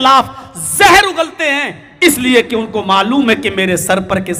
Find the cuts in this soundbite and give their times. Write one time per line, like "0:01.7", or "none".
none